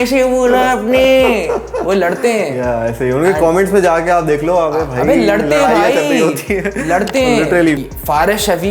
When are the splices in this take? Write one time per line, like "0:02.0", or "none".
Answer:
0:07.8